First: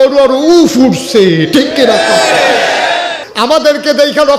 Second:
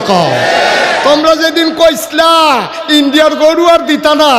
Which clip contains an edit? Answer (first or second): first